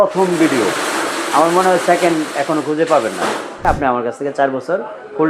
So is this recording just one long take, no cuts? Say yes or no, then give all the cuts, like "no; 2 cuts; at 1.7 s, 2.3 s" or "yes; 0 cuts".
no; 1 cut; at 3.6 s